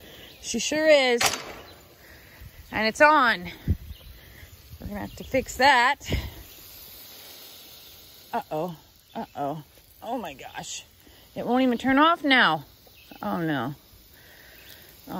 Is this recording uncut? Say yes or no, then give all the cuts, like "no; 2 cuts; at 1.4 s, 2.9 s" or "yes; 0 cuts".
yes; 0 cuts